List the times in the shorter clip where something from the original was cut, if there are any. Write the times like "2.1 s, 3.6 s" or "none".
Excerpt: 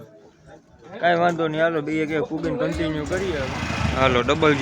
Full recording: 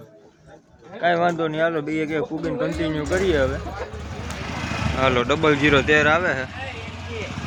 3.5 s